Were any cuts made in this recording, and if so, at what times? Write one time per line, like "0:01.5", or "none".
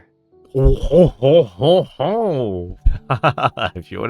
0:02.7